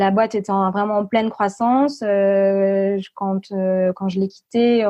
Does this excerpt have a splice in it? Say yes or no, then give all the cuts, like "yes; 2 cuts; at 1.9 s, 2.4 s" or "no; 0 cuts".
no; 0 cuts